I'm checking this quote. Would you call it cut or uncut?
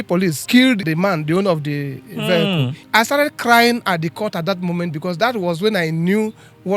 cut